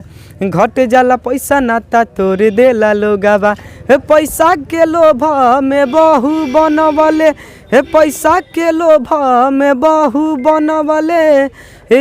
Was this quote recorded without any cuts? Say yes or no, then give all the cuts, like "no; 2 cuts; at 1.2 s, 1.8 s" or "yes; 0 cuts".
yes; 0 cuts